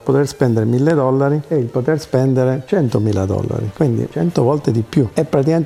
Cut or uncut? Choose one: uncut